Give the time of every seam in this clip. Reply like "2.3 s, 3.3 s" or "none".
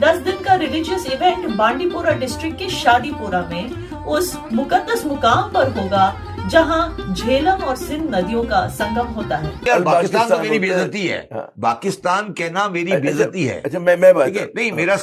9.6 s